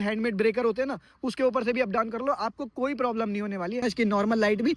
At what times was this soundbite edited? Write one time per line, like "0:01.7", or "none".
0:03.8